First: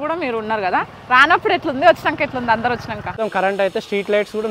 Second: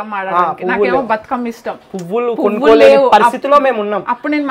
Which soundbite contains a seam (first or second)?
first